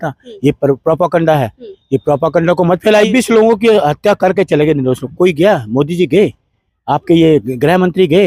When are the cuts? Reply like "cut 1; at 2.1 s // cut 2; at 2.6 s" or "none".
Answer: cut 1; at 3.1 s